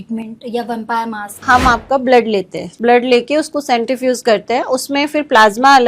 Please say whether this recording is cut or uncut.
cut